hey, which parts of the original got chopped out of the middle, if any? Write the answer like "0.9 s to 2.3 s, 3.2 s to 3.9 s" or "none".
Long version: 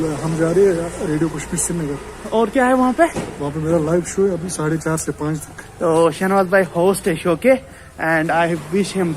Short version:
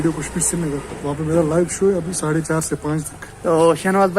2.1 s to 3.3 s